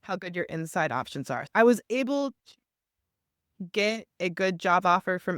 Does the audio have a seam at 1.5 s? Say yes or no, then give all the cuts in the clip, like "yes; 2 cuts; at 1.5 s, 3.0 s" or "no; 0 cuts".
yes; 1 cut; at 1.5 s